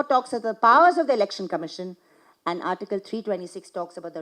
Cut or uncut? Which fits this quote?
uncut